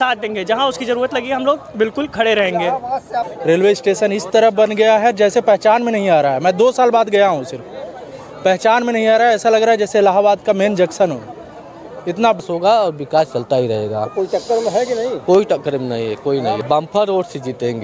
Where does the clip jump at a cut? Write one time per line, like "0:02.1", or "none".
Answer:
0:03.3
0:12.4
0:16.6